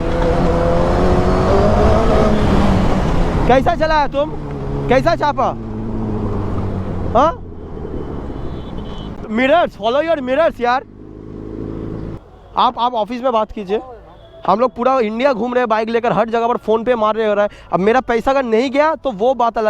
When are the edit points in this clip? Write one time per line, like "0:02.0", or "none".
0:09.1
0:12.2